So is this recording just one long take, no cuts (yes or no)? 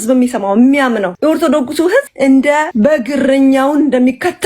no